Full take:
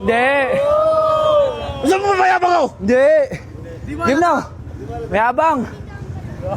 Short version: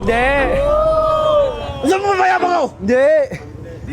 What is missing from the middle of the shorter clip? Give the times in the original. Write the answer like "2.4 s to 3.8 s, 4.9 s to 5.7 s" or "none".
none